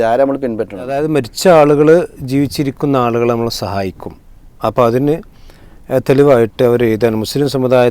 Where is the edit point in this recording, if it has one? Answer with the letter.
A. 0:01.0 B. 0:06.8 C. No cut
A